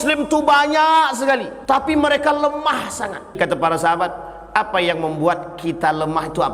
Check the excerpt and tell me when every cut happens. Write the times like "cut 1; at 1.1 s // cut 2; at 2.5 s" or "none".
cut 1; at 1.5 s // cut 2; at 3.4 s